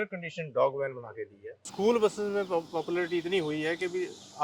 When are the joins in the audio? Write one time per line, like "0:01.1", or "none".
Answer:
0:01.6